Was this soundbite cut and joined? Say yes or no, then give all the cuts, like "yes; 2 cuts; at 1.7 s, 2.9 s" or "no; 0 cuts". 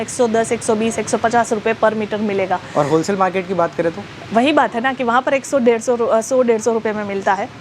no; 0 cuts